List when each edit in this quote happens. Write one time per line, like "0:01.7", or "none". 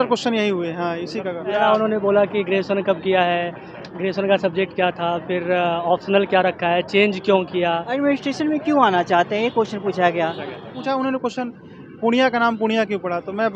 0:01.6
0:07.9
0:10.8